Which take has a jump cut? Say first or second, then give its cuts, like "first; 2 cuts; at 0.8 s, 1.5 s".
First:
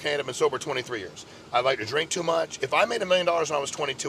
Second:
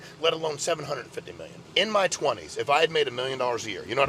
second; 1 cut; at 1.5 s